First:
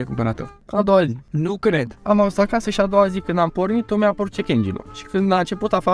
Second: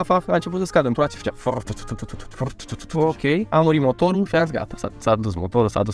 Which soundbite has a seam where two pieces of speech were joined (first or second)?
first